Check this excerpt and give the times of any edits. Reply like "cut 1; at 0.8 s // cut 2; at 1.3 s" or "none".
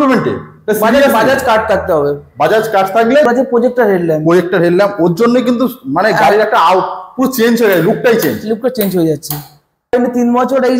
cut 1; at 3.2 s // cut 2; at 9.9 s